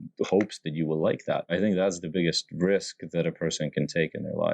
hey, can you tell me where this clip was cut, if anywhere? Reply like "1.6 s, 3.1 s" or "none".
1.5 s